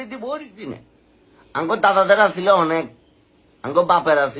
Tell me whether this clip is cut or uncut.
cut